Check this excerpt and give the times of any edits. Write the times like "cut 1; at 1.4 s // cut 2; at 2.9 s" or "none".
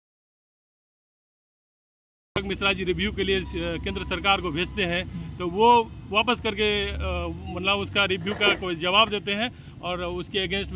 none

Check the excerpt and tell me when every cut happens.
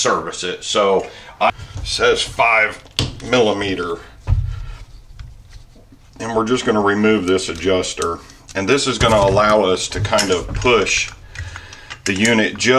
cut 1; at 1.5 s

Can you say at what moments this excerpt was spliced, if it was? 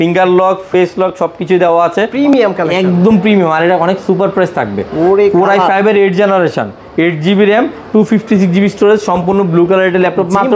cut 1; at 2.1 s

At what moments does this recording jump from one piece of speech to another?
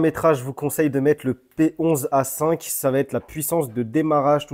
none

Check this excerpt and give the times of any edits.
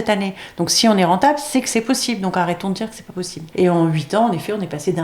cut 1; at 3.4 s

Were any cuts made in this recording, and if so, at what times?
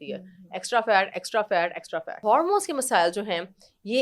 cut 1; at 2.2 s

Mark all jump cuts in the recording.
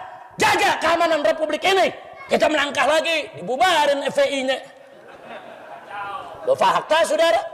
cut 1; at 2.1 s

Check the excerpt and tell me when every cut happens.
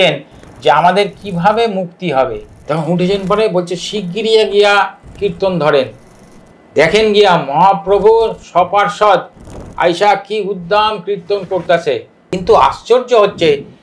cut 1; at 2.5 s // cut 2; at 12.2 s

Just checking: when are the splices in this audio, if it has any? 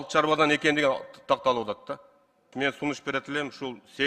cut 1; at 2.5 s

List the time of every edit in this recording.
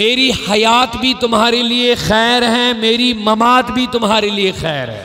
none

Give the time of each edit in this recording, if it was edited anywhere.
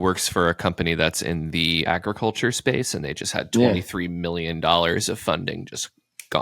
cut 1; at 1.8 s

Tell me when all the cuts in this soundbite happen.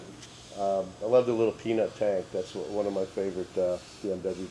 none

